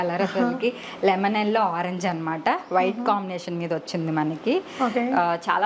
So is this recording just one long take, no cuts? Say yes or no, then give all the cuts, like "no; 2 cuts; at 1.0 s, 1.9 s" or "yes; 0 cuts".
yes; 0 cuts